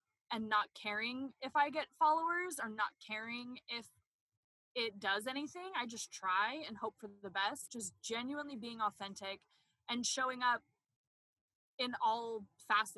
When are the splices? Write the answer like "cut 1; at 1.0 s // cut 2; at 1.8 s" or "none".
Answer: cut 1; at 7.6 s